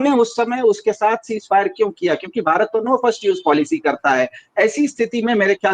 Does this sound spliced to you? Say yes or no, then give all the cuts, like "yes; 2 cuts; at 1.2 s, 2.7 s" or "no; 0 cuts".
no; 0 cuts